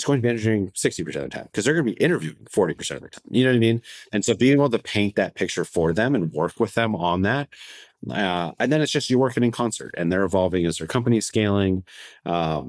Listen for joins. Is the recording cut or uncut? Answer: uncut